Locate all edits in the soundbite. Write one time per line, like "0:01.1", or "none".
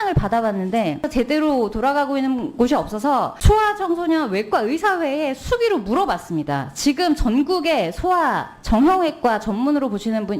0:01.0
0:03.3